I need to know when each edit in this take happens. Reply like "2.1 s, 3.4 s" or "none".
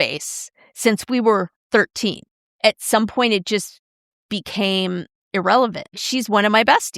2.6 s, 5.2 s, 6.0 s